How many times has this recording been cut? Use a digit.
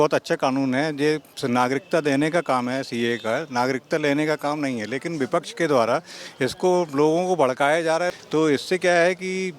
1